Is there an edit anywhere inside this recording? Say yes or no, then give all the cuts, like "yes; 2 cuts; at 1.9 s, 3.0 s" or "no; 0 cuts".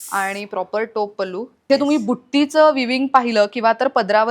yes; 1 cut; at 1.7 s